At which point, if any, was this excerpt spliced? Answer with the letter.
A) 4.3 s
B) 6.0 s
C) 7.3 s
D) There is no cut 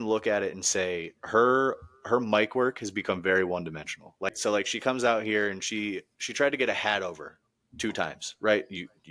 A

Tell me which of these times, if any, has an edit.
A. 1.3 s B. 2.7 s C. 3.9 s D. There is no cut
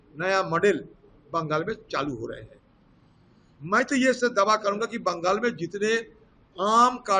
D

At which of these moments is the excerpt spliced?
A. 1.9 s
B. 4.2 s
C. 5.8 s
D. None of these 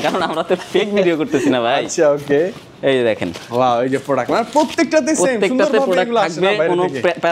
D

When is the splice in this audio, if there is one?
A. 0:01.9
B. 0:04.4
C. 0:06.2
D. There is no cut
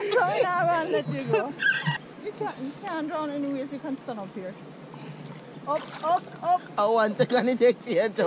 A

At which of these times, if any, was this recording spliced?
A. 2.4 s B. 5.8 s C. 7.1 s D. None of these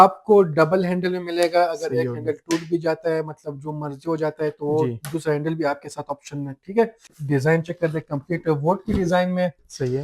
C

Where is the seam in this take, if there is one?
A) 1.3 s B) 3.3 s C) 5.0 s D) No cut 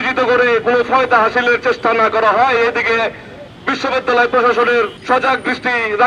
C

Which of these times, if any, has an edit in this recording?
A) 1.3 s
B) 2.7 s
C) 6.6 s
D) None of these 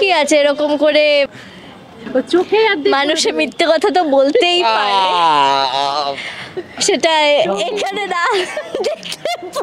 A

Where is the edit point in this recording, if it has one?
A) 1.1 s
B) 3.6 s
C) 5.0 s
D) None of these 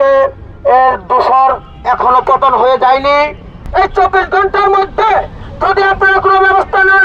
B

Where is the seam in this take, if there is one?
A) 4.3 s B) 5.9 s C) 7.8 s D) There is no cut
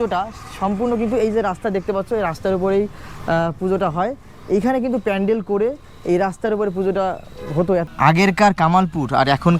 C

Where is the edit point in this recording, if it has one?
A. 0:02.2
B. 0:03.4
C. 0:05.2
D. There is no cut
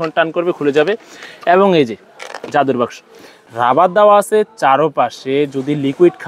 B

